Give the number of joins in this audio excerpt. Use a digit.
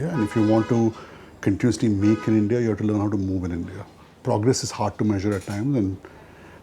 1